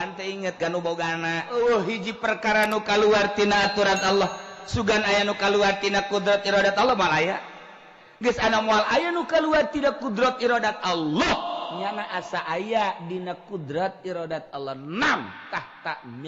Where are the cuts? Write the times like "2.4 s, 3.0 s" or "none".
1.5 s